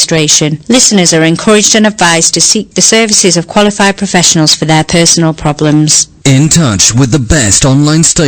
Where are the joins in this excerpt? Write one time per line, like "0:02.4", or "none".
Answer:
none